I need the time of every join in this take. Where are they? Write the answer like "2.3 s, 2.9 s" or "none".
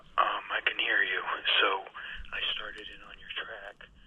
none